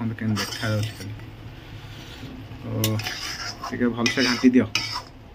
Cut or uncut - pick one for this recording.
uncut